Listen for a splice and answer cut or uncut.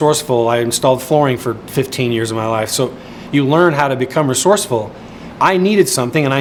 uncut